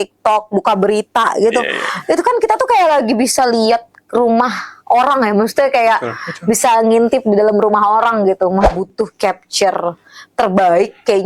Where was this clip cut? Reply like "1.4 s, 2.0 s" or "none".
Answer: 8.7 s